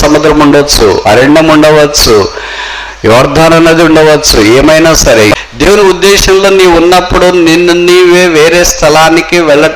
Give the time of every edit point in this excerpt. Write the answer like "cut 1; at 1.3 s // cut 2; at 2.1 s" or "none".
cut 1; at 5.4 s